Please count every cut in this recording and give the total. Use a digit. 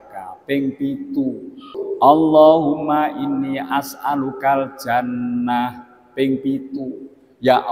1